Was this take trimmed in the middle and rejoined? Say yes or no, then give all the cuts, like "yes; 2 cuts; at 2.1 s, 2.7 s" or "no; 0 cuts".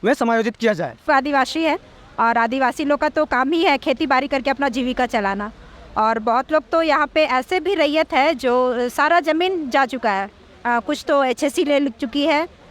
yes; 1 cut; at 1.1 s